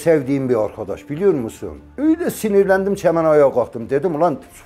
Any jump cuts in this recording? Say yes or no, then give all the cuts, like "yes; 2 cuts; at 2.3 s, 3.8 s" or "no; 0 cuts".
no; 0 cuts